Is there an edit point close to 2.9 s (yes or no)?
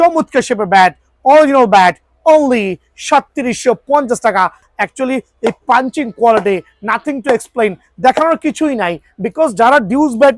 no